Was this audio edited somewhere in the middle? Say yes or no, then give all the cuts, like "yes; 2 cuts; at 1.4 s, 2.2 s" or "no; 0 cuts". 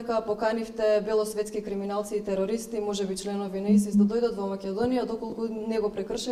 no; 0 cuts